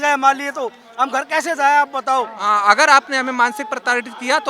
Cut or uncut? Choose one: cut